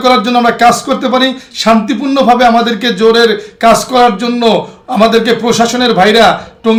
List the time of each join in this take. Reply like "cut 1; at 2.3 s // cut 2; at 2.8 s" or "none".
none